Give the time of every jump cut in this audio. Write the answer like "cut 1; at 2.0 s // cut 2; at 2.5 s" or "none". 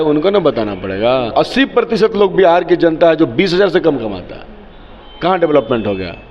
cut 1; at 1.3 s

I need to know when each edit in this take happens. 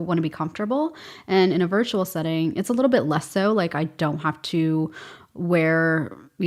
none

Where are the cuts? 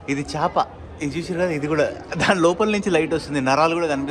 none

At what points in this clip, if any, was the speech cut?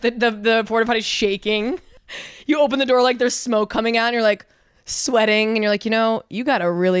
cut 1; at 1.9 s

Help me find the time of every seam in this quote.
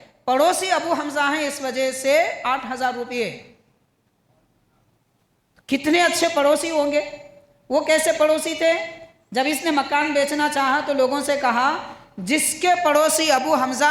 none

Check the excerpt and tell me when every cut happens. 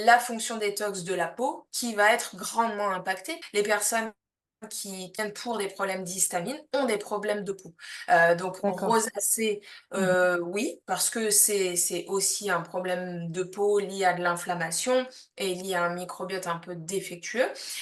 cut 1; at 3.4 s // cut 2; at 5.2 s

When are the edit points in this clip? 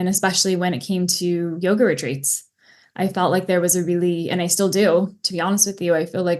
none

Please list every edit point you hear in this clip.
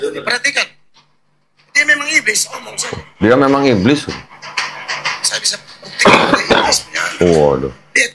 none

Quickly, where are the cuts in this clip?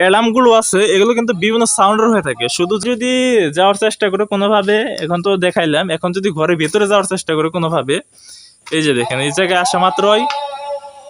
cut 1; at 2.8 s

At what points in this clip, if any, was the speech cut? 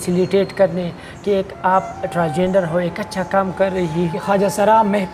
cut 1; at 4.2 s

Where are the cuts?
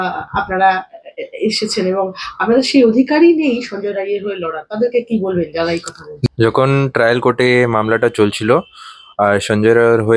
none

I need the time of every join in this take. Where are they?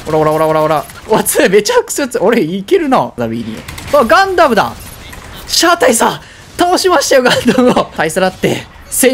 cut 1; at 3.2 s // cut 2; at 7.9 s

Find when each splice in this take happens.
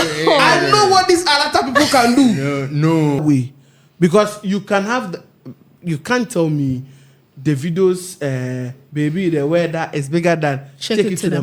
cut 1; at 3.2 s

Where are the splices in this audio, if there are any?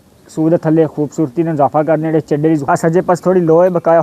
cut 1; at 2.6 s

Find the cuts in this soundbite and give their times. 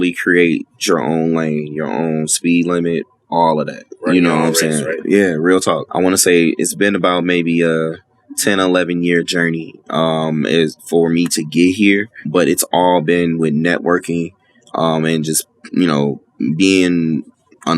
cut 1; at 5.8 s // cut 2; at 12.2 s

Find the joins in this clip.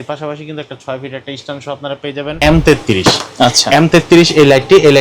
cut 1; at 2.4 s

